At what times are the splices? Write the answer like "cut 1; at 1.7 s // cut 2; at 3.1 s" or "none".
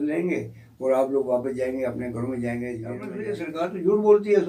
cut 1; at 3.3 s